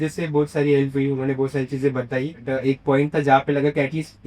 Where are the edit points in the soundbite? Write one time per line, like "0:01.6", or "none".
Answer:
0:02.4